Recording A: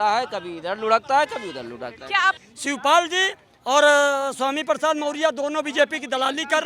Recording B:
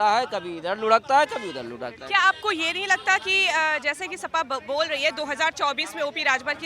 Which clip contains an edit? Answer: A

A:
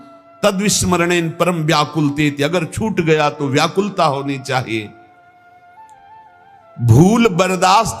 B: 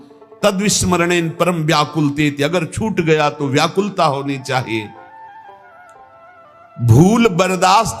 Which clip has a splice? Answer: A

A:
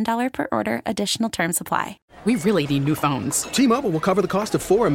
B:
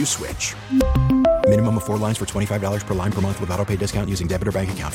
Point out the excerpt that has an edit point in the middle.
A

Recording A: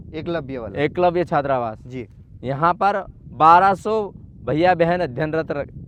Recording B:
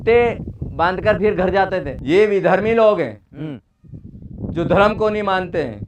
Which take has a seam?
B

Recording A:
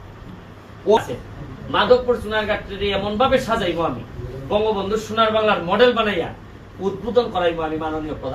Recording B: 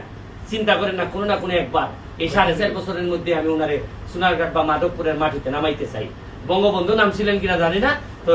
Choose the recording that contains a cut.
A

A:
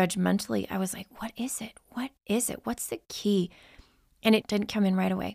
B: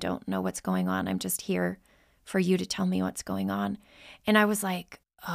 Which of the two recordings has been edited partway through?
A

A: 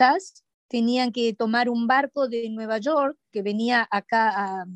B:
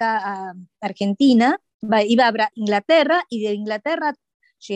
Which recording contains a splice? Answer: B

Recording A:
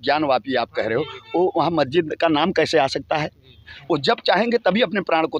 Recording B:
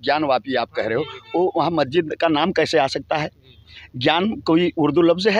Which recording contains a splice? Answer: A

